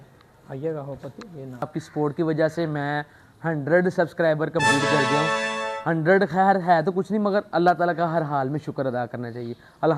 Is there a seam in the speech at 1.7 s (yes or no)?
yes